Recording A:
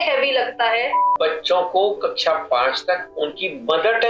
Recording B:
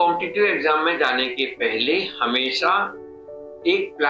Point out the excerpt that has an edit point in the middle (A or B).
A